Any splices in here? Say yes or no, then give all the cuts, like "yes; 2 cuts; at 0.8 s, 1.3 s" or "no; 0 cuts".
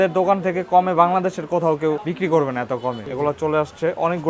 yes; 2 cuts; at 2.1 s, 3.1 s